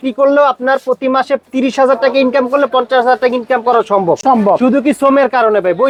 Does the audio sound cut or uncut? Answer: uncut